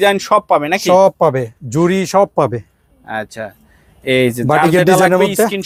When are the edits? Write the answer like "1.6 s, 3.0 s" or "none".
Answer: none